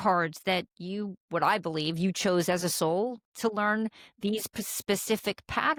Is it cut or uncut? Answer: uncut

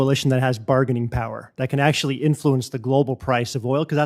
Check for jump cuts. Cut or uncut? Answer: uncut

